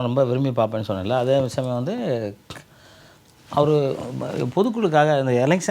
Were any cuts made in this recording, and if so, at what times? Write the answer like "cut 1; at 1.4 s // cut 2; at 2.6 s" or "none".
none